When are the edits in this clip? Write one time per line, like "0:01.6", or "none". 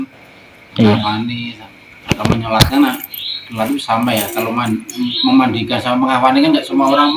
none